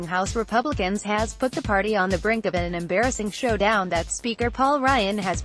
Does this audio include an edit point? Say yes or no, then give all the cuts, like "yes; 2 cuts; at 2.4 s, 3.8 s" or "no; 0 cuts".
no; 0 cuts